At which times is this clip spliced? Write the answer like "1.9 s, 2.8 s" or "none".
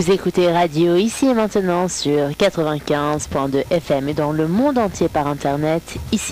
none